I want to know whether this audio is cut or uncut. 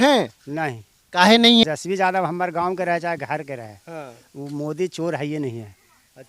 cut